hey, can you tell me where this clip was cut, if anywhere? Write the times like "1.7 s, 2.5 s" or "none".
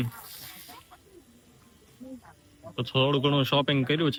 none